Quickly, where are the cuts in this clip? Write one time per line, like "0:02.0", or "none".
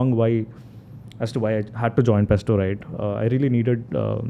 none

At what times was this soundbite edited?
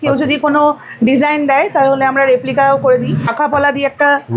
0:03.3

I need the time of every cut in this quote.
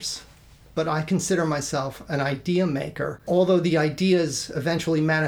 none

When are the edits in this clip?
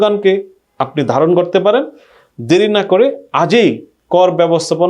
none

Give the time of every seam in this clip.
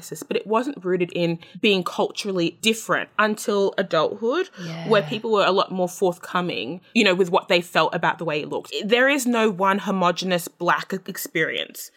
0:01.5
0:08.7

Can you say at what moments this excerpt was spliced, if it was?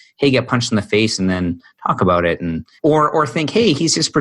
0:02.6

